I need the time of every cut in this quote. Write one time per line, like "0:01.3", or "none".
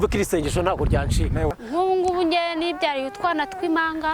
0:01.5